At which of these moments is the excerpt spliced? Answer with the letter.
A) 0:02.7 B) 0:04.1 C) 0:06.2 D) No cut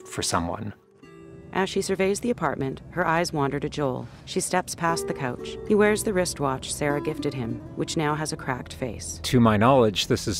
D